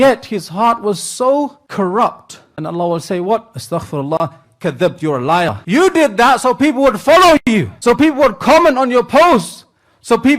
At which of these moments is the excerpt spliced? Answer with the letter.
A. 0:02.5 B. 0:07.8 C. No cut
A